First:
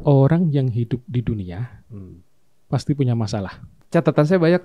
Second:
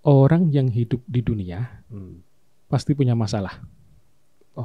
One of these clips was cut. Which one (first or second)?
first